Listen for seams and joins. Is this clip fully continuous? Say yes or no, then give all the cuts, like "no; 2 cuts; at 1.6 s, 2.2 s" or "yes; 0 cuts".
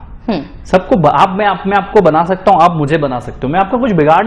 yes; 0 cuts